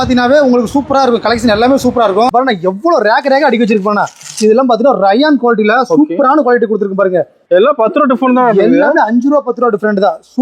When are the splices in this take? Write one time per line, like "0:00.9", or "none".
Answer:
0:02.3
0:07.3